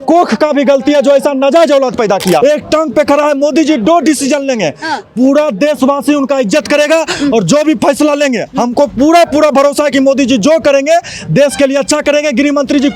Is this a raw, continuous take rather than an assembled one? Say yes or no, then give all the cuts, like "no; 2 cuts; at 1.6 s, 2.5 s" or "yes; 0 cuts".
no; 1 cut; at 2.4 s